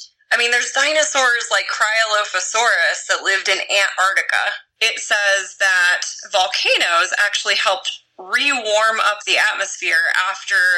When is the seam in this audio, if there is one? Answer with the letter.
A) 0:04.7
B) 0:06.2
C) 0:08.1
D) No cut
A